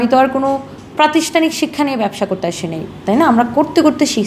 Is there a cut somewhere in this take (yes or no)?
no